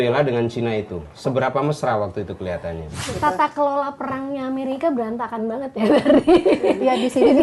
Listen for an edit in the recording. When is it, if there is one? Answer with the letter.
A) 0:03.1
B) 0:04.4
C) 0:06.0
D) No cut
A